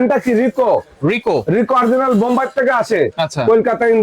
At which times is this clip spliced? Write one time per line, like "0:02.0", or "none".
none